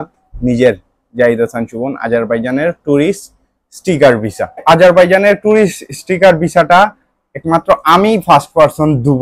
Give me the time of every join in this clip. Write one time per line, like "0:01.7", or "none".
0:04.6

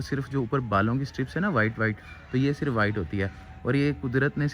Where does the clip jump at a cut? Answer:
none

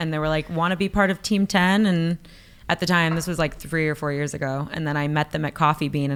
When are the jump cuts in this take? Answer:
none

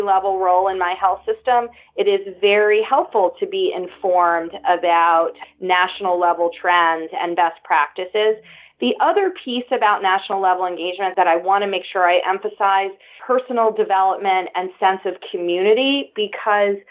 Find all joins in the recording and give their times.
0:05.4
0:11.1
0:13.2

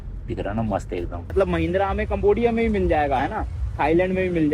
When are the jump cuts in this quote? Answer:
0:01.3

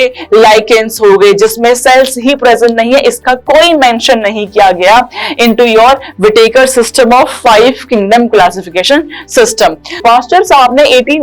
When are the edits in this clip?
0:10.0

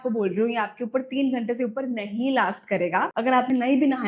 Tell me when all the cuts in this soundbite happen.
0:03.1

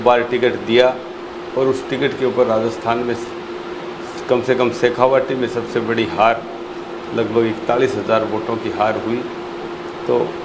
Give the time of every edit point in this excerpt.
none

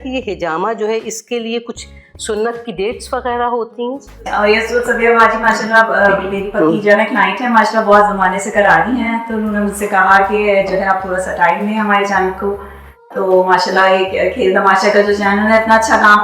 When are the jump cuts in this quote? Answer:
0:04.1

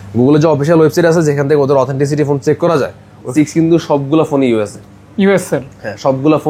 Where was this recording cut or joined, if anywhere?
0:03.3

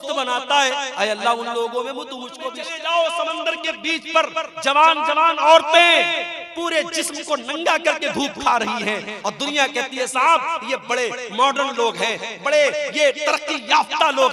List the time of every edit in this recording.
0:02.6

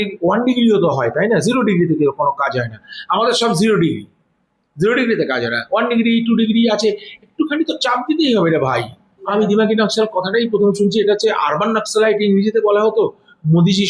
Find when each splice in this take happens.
0:09.5

